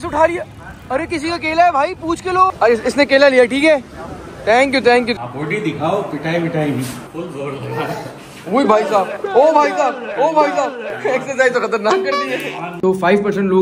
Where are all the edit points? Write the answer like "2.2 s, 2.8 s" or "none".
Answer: 5.1 s, 12.6 s